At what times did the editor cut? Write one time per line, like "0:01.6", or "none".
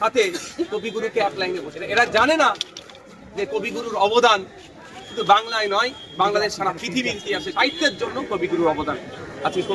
0:01.8
0:07.7